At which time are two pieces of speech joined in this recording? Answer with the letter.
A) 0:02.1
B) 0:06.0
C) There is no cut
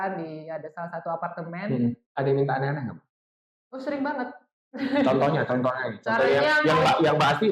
A